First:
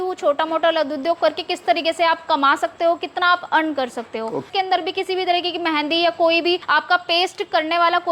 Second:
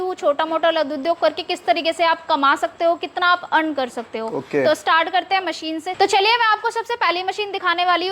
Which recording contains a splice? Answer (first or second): first